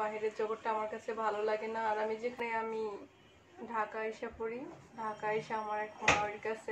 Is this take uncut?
no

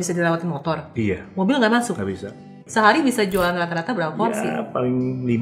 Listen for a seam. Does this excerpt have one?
yes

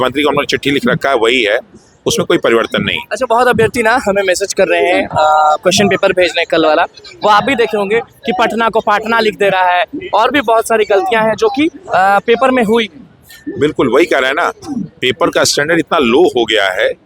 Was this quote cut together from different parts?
no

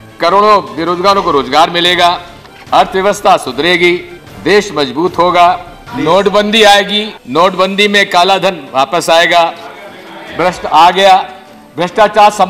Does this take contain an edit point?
no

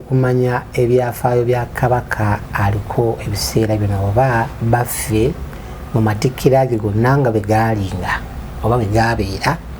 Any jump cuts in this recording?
no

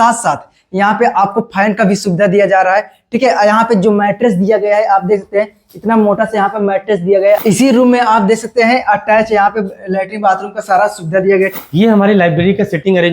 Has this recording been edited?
yes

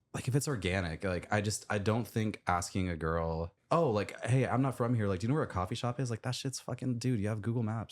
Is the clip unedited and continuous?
no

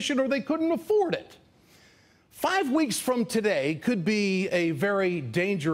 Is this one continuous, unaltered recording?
no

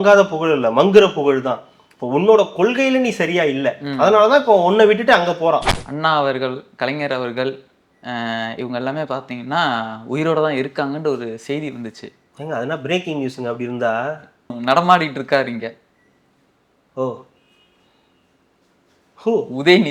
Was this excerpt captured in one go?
no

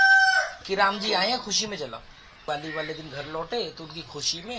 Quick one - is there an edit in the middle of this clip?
yes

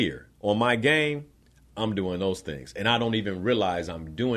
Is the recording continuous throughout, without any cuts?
yes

